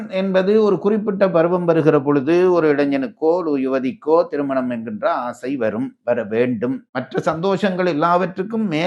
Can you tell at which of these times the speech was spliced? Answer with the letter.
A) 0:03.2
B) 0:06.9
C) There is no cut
B